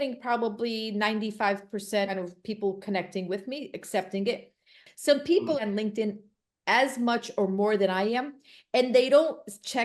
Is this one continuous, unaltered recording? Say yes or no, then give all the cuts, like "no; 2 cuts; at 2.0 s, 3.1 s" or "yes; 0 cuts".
no; 2 cuts; at 2.1 s, 4.8 s